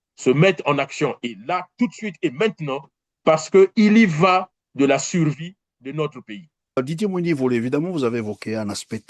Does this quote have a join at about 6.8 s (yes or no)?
yes